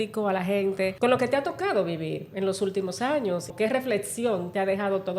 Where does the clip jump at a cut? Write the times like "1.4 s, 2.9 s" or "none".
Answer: 0.9 s, 3.5 s